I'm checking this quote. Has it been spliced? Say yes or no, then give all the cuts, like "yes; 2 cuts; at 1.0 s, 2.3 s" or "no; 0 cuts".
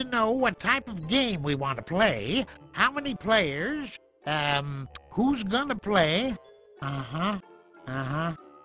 no; 0 cuts